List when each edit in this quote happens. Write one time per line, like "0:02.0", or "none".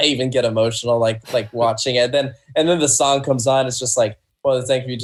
none